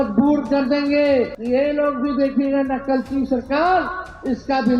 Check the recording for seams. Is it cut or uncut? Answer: cut